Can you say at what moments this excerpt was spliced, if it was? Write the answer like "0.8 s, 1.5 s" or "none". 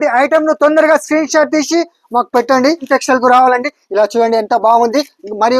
2.9 s